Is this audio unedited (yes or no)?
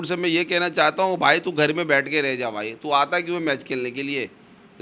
yes